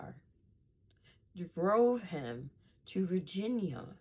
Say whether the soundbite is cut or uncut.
uncut